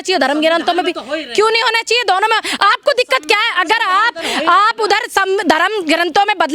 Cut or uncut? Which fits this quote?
uncut